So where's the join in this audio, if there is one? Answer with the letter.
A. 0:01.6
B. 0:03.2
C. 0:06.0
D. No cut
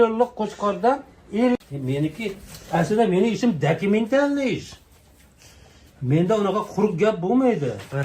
A